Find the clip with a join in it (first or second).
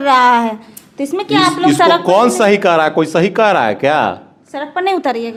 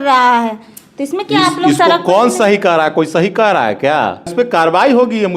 second